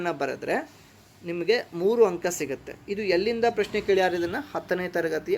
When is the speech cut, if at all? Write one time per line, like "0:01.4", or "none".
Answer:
none